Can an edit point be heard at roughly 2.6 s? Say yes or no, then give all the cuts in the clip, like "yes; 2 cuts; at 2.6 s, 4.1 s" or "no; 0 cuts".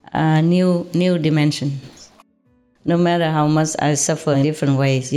yes; 1 cut; at 2.6 s